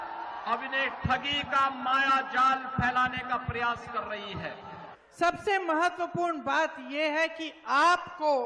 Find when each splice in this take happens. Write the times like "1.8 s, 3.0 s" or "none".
5.0 s

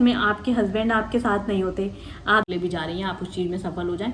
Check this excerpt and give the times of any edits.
2.5 s

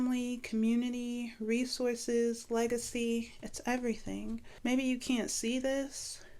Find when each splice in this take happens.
4.5 s

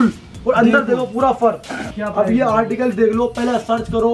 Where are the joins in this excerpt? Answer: 1.8 s

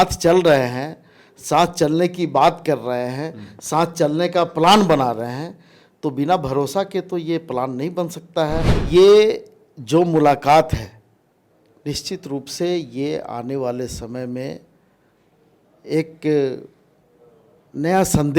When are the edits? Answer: 8.8 s

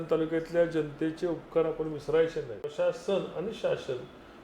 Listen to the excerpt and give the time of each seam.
2.7 s

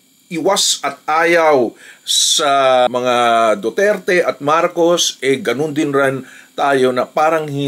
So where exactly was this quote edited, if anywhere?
none

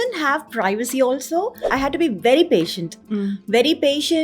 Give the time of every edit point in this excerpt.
1.7 s

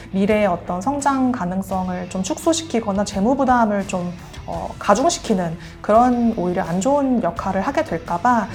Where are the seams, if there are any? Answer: none

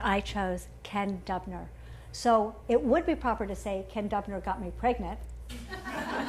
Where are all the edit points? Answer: 3.8 s

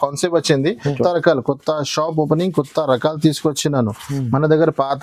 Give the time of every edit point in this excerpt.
1.0 s

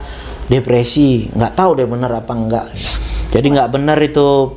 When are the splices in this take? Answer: 2.9 s

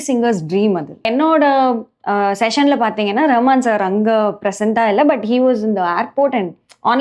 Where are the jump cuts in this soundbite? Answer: 1.1 s

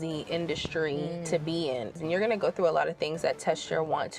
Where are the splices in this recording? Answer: 2.0 s

